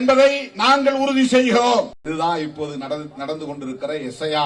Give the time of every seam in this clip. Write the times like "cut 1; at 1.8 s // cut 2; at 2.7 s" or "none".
cut 1; at 2.0 s